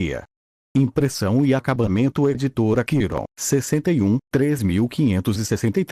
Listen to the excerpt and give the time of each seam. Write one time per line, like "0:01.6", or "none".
none